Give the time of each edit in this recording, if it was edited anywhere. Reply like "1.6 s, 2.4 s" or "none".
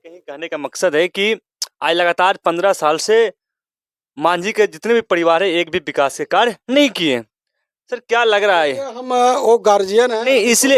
none